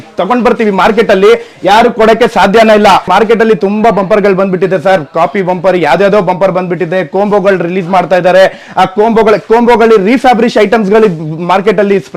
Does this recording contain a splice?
yes; 1 cut; at 3.1 s

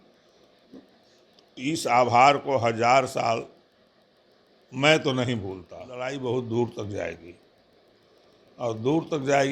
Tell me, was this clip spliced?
yes; 1 cut; at 6.0 s

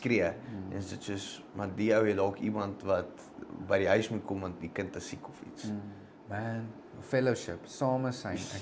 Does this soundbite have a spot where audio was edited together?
yes; 1 cut; at 6.1 s

